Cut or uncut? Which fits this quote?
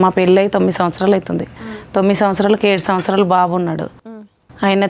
uncut